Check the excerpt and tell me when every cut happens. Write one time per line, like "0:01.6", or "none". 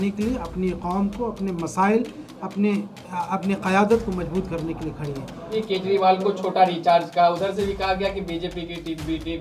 0:05.5